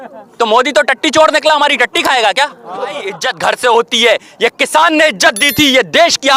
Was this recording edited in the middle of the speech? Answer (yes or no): yes